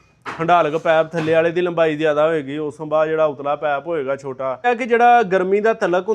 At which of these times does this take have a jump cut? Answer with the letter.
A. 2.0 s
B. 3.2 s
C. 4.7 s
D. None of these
C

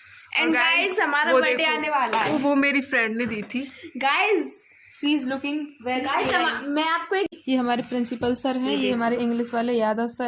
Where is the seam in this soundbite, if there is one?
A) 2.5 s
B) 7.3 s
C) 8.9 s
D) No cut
B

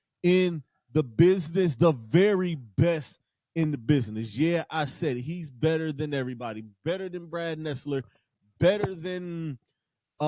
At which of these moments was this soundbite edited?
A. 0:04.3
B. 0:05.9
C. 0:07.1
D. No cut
D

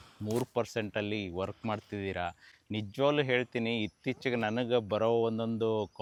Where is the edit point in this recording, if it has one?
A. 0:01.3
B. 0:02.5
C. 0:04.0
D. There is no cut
D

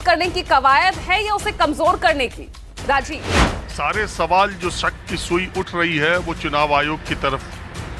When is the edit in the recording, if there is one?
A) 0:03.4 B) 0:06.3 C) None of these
A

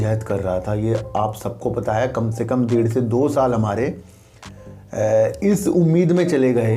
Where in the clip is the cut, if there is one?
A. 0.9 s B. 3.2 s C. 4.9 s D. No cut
D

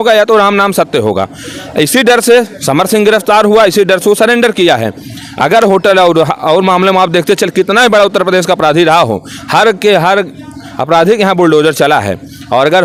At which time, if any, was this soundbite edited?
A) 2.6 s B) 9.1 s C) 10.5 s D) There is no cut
D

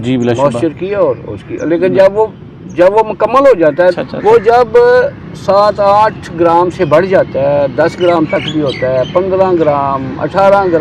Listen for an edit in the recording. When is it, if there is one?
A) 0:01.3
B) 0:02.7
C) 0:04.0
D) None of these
C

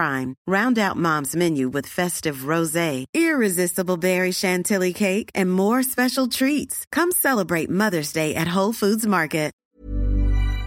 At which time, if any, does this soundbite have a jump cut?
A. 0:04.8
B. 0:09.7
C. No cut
B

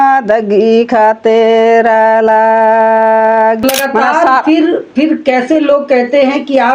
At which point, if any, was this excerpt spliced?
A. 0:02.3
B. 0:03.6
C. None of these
B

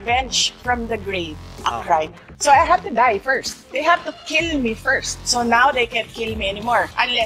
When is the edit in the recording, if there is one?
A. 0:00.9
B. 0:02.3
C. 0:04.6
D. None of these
B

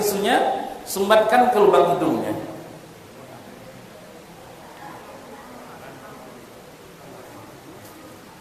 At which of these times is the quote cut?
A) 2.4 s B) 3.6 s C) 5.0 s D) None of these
D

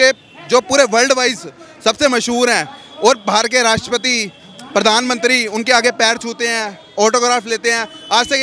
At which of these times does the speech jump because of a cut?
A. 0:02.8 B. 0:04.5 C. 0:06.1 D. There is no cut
D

